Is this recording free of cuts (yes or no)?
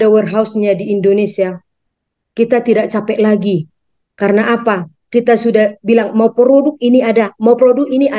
yes